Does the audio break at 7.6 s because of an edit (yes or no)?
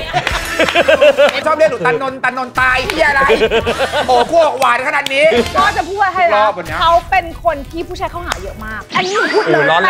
no